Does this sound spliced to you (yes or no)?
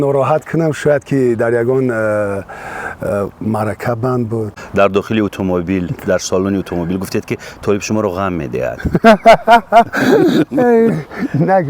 yes